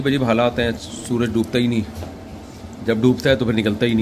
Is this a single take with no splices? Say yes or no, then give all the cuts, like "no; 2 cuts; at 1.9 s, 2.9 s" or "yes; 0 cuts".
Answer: yes; 0 cuts